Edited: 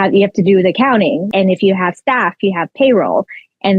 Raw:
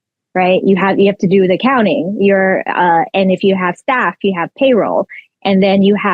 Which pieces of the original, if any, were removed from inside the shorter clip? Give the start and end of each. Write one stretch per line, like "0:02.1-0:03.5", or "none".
0:02.1-0:03.1